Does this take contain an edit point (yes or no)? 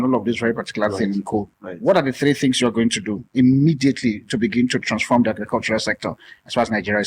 yes